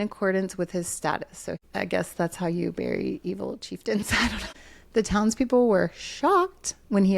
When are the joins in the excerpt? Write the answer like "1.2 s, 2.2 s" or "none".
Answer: 1.6 s, 4.8 s

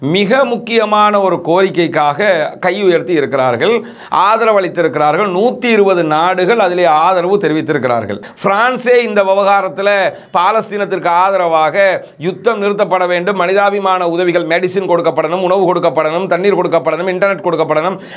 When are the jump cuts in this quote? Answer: 8.2 s

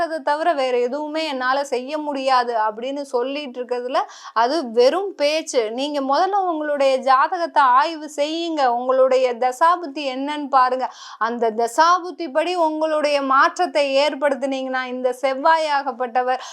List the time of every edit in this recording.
none

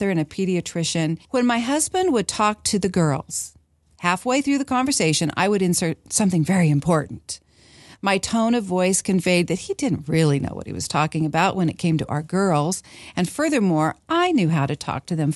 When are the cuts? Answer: 1.2 s

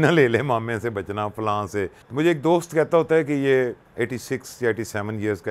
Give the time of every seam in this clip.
2.0 s, 3.9 s

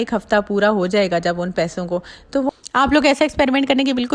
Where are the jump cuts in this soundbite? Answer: 2.5 s

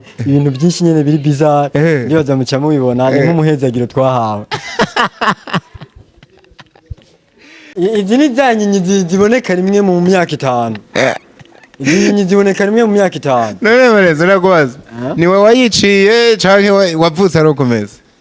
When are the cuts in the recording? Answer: 7.6 s

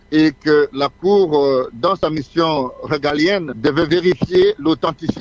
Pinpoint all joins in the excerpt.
none

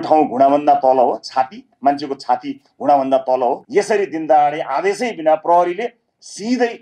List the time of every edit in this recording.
3.6 s

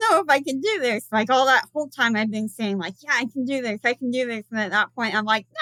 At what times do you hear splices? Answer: none

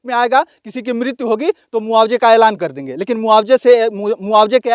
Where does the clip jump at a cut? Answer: none

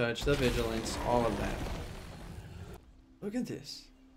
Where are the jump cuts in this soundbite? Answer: 2.6 s

